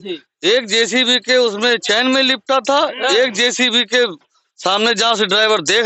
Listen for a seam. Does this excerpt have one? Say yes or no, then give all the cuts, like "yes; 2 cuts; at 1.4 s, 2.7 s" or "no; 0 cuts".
no; 0 cuts